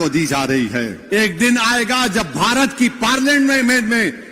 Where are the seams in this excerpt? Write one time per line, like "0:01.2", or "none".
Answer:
0:01.0